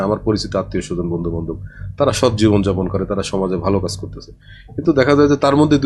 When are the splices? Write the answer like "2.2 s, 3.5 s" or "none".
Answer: none